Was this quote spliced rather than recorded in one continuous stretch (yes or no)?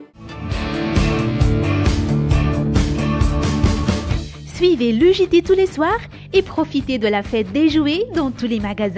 no